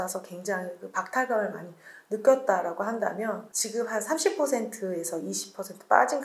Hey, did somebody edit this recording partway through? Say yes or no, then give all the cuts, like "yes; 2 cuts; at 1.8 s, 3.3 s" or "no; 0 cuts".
yes; 1 cut; at 3.5 s